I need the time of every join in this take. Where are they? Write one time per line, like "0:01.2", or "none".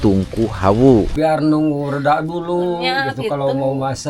0:01.1

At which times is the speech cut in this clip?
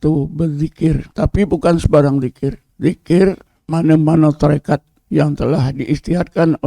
0:01.1
0:02.7
0:03.5
0:04.9

